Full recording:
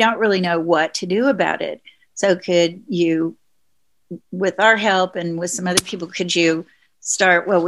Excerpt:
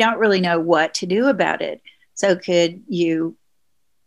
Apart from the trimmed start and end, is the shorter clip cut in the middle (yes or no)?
no